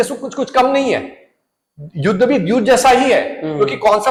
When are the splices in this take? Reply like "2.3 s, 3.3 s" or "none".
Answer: none